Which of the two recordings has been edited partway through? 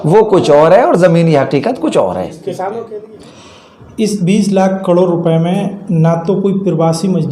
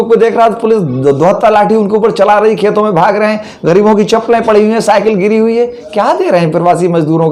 first; 1 cut; at 3.0 s

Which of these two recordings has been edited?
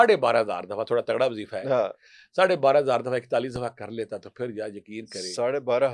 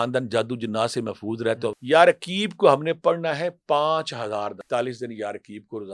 second; 2 cuts; at 1.8 s, 4.6 s

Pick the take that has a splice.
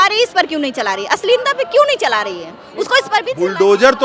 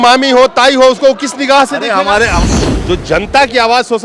second; 1 cut; at 2.4 s

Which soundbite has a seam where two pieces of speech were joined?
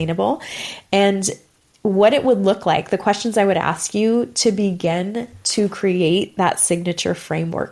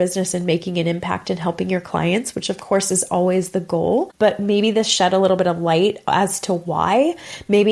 second; 1 cut; at 4.1 s

